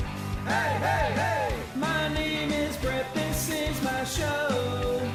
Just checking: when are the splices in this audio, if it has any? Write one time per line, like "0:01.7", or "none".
none